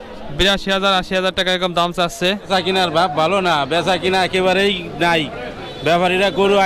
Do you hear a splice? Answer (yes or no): yes